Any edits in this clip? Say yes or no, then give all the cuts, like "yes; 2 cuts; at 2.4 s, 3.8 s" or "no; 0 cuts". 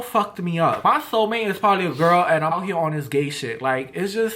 yes; 2 cuts; at 0.8 s, 2.5 s